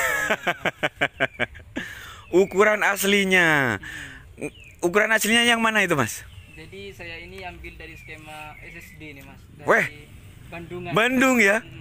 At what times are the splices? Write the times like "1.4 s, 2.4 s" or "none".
none